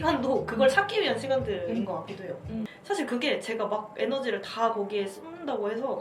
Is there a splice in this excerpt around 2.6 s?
yes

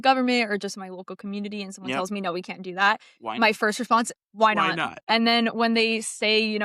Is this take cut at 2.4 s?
no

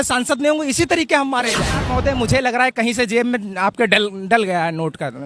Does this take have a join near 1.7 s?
yes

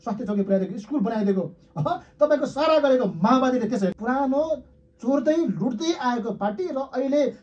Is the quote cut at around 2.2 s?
no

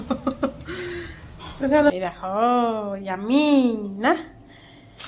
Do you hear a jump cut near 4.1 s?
no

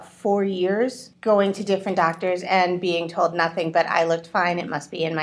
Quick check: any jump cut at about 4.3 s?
no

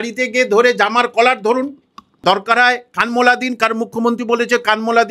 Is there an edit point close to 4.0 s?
no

